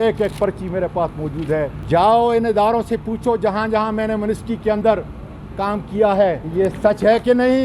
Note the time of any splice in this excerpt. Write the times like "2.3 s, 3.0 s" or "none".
1.8 s, 6.4 s

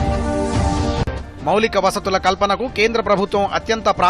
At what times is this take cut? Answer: 1.1 s

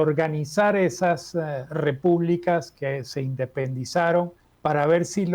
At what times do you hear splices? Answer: 4.4 s

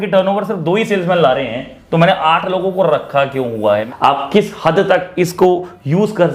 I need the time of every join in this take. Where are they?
3.8 s

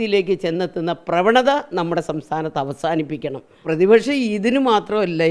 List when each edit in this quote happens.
3.6 s

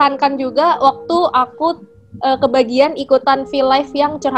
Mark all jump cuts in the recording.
none

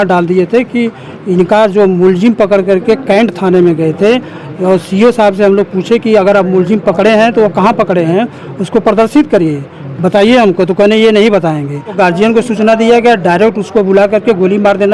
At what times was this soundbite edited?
12.0 s

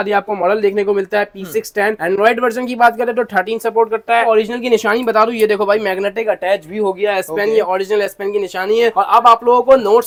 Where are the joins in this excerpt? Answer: none

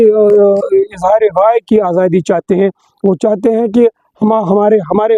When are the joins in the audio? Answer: none

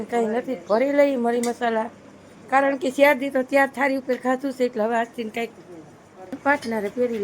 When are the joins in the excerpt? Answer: 6.3 s

